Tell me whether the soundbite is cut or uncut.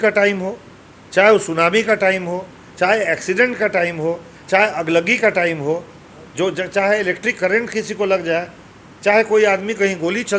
uncut